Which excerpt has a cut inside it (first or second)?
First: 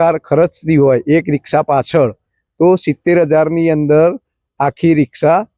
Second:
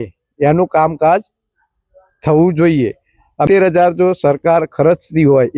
second